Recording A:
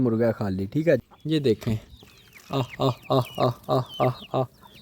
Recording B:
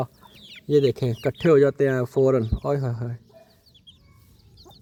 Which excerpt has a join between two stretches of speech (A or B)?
A